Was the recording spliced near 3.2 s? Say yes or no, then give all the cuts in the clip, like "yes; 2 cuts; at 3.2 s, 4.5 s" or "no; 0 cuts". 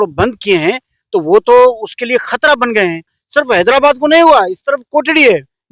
yes; 1 cut; at 3.2 s